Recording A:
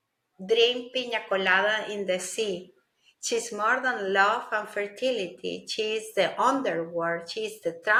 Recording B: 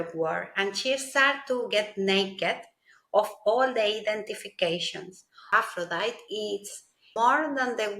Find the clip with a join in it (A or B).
B